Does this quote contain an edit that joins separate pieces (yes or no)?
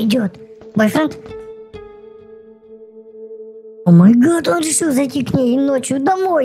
no